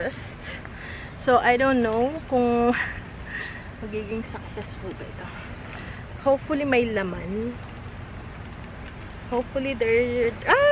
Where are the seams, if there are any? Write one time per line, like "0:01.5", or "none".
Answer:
none